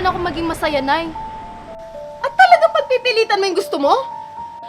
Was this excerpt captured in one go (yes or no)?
yes